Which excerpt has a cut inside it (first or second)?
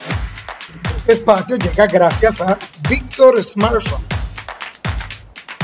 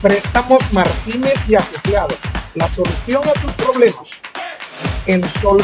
first